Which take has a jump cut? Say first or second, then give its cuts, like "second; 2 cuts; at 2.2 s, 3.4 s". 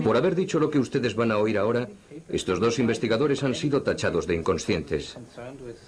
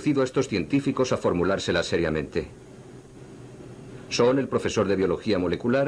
first; 1 cut; at 3.0 s